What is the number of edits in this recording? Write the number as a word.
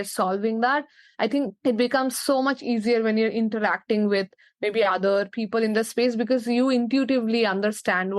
one